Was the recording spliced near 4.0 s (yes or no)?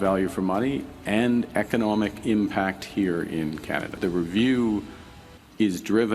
yes